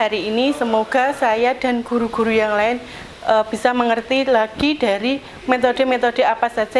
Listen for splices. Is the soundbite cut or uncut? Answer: uncut